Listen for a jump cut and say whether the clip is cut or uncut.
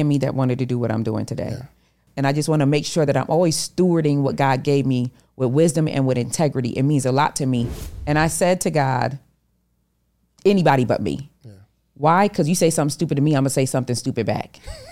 cut